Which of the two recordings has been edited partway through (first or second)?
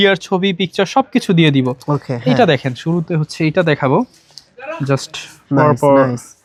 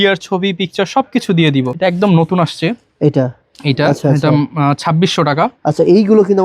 second